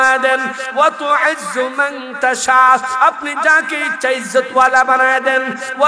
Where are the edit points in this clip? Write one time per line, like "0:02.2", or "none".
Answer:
none